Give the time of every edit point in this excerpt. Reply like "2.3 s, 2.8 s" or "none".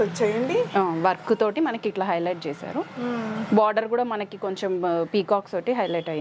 none